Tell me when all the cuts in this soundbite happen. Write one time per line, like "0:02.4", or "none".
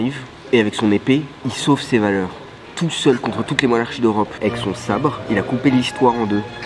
0:04.3

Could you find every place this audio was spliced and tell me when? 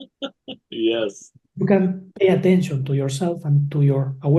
0:02.0

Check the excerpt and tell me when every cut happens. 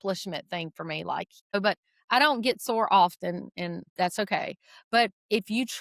0:01.5
0:03.8

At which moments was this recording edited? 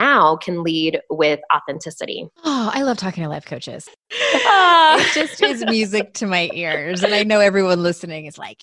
0:02.2
0:03.6

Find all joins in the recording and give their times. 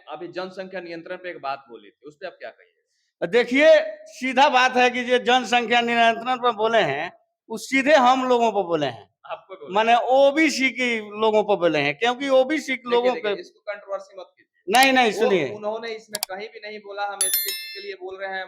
none

